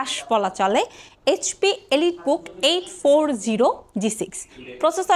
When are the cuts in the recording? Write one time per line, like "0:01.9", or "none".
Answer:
none